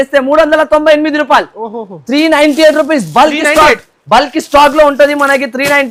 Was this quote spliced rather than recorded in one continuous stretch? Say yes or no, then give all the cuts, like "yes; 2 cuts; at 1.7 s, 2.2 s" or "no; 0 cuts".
no; 0 cuts